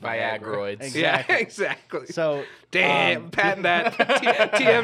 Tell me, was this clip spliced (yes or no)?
no